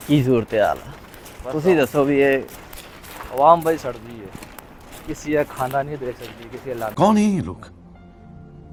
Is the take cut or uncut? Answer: uncut